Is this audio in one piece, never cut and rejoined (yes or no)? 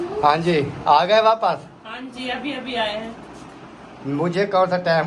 yes